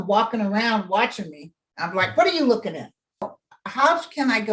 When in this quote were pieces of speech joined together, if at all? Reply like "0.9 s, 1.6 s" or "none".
3.4 s